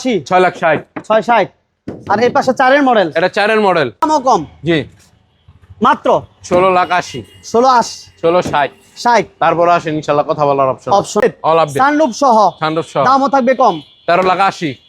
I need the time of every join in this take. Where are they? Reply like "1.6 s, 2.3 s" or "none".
4.0 s, 11.2 s